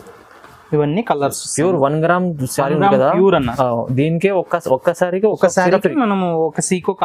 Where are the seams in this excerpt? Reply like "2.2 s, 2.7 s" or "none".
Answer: none